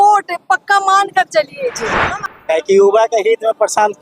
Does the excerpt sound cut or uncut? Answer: cut